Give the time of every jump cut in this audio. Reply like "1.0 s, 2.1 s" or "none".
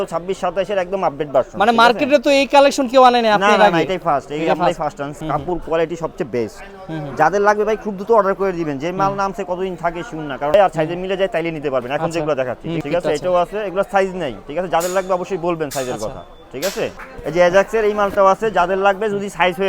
5.2 s, 10.5 s, 12.8 s, 17.1 s